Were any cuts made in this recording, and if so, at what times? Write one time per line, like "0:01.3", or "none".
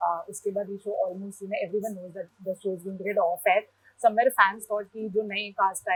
none